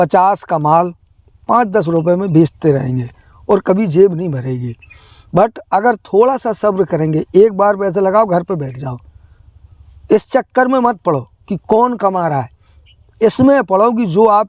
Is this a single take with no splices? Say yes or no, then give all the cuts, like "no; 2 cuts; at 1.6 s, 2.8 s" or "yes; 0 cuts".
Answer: yes; 0 cuts